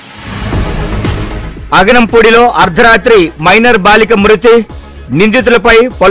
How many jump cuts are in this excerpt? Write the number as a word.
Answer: one